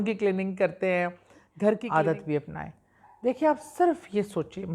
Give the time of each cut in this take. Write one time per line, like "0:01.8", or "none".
0:01.8